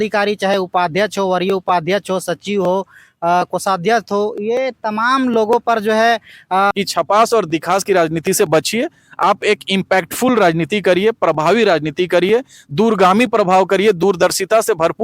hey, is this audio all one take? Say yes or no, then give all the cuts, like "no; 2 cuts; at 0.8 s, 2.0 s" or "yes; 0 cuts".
no; 1 cut; at 6.7 s